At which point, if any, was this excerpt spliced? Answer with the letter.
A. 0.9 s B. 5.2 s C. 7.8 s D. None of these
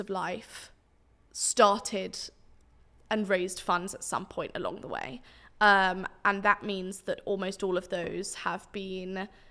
D